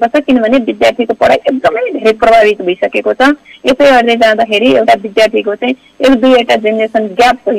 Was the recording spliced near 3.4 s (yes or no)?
no